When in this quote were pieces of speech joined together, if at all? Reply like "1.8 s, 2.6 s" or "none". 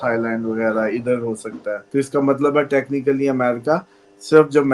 1.8 s